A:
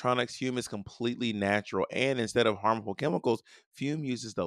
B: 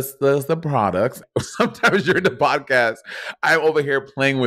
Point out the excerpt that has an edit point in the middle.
B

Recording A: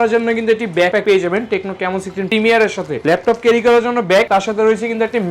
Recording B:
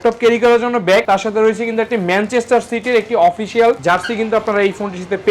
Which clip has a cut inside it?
A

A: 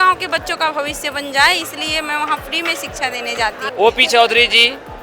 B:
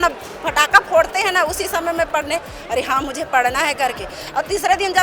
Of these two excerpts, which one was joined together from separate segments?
A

